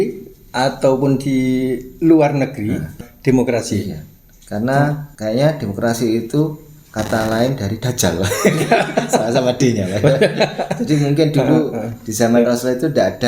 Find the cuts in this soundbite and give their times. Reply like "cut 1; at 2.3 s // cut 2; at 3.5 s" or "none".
cut 1; at 2.9 s // cut 2; at 5.1 s